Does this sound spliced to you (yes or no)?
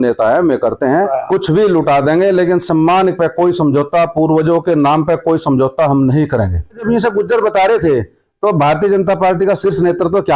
yes